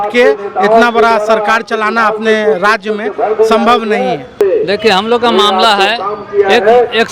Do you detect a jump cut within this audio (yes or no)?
yes